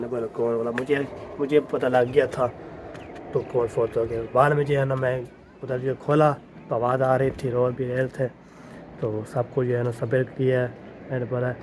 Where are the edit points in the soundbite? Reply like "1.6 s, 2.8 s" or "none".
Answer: none

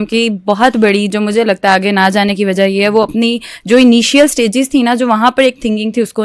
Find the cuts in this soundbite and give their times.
none

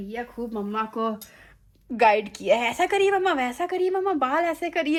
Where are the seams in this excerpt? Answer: none

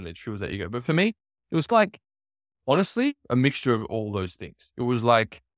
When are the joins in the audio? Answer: none

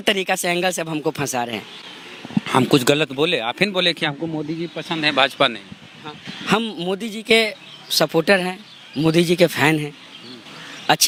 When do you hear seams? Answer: none

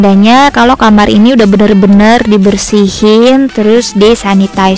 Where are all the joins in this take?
none

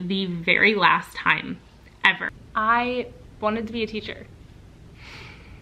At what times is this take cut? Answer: 2.3 s

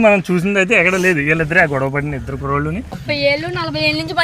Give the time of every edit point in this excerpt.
2.9 s

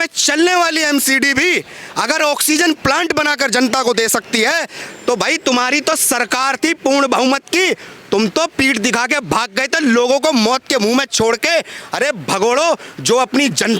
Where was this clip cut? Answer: none

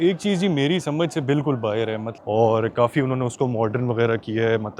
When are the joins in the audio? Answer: 2.1 s

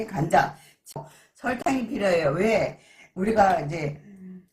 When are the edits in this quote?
1.0 s

